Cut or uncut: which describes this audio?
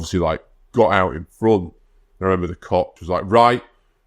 cut